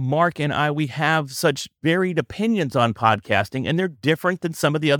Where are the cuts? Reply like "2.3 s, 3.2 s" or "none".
1.7 s